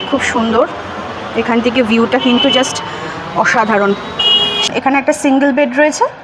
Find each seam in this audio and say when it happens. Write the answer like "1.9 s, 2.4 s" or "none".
4.7 s